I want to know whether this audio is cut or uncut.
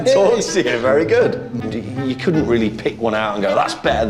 cut